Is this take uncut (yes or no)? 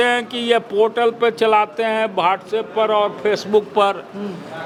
yes